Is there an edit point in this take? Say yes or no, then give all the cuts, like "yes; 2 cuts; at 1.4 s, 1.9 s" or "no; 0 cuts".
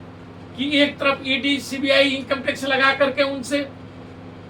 no; 0 cuts